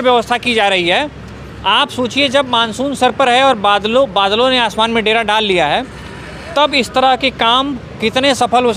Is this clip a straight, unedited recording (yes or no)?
yes